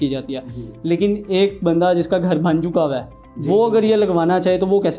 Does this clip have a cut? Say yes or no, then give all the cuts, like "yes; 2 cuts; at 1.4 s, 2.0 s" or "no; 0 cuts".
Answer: no; 0 cuts